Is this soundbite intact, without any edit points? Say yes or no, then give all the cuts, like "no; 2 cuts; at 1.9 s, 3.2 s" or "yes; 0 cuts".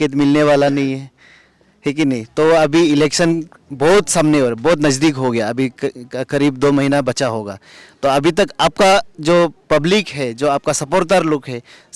yes; 0 cuts